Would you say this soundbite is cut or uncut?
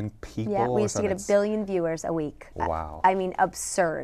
uncut